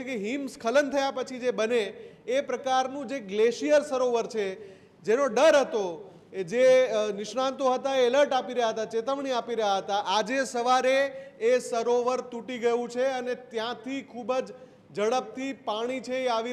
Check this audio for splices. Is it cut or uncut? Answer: uncut